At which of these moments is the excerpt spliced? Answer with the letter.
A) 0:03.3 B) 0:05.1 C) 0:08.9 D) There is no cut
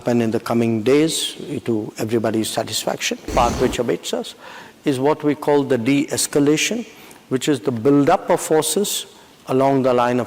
A